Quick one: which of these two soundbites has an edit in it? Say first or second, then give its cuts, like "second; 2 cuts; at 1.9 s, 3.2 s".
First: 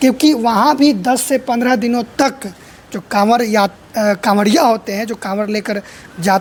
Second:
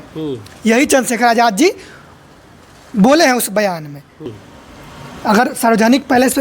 second; 1 cut; at 4.3 s